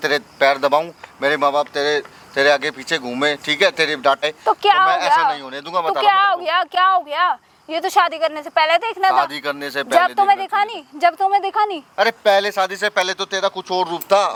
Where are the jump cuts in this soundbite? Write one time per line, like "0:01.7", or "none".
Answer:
none